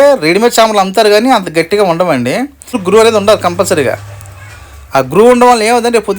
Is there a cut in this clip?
yes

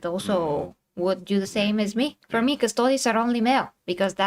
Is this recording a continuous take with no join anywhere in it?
no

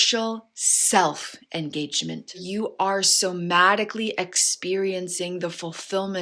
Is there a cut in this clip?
yes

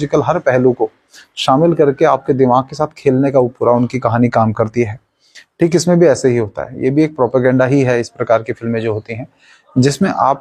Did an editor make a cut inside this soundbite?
no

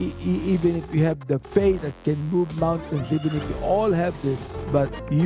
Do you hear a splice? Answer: no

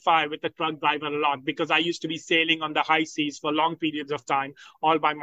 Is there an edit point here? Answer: no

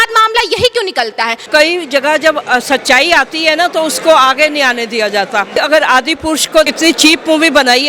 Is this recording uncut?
no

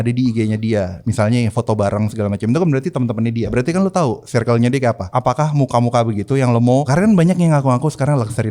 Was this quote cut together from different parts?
yes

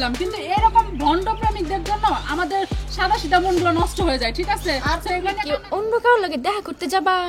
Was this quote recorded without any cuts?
no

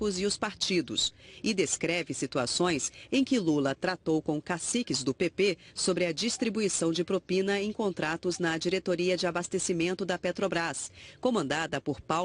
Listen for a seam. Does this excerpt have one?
yes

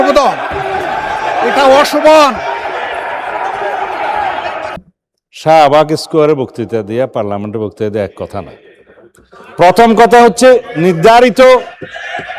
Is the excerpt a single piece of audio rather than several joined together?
no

